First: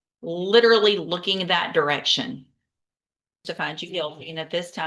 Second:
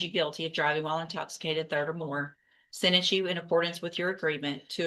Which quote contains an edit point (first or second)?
first